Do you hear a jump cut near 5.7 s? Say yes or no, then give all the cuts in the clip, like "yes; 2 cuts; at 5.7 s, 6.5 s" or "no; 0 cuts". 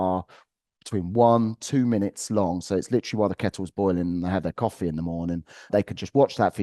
yes; 1 cut; at 5.7 s